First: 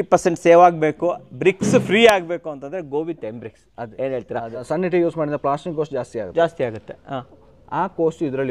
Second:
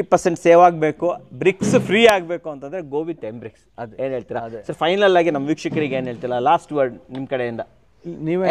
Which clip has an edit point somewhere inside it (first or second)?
first